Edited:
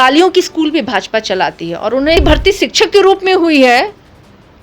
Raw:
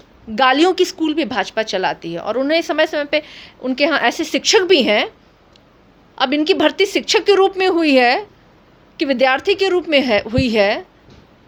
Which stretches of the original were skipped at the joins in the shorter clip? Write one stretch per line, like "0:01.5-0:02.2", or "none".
0:02.6-0:06.5